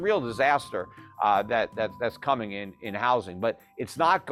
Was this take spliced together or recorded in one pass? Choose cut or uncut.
uncut